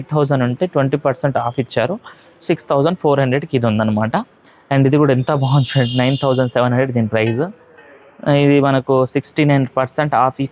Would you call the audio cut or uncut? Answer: uncut